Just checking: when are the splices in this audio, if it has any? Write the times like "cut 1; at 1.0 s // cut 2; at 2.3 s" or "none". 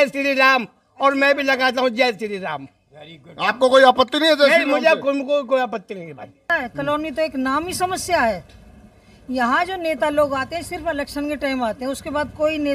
cut 1; at 6.5 s